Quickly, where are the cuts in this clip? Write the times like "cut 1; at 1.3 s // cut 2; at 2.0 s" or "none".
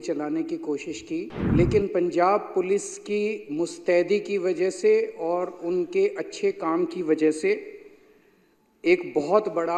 cut 1; at 1.4 s